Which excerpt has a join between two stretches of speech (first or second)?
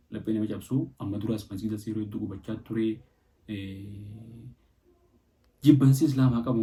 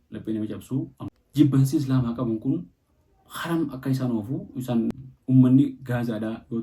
second